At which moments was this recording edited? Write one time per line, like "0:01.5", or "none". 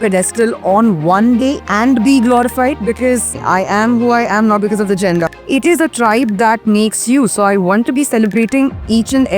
0:01.6
0:03.4
0:05.3